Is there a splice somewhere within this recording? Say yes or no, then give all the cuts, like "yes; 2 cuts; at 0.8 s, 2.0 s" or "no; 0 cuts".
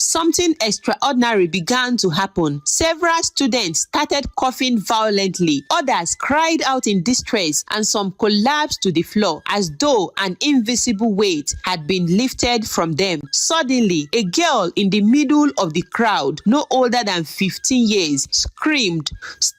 yes; 1 cut; at 13.3 s